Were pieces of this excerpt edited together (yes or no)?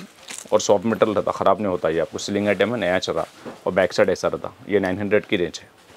no